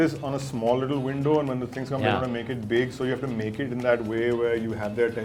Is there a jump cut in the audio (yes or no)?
no